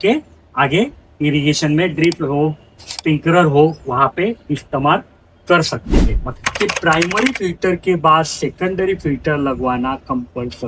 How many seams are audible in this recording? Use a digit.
1